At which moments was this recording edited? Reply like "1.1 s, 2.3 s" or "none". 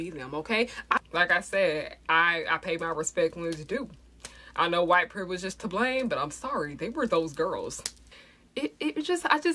1.0 s, 8.0 s